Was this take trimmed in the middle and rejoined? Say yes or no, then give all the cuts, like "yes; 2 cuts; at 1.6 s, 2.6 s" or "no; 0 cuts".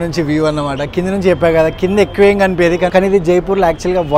yes; 1 cut; at 2.9 s